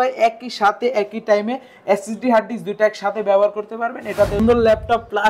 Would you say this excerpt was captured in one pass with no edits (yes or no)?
no